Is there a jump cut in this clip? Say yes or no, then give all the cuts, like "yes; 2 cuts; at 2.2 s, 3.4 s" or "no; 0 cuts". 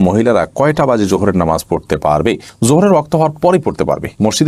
no; 0 cuts